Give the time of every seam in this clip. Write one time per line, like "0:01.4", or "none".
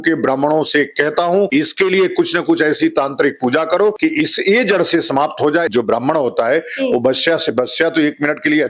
0:01.5
0:04.0
0:05.7